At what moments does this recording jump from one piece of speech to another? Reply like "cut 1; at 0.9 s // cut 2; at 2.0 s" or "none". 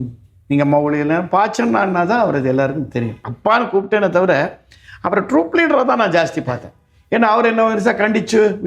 cut 1; at 3.3 s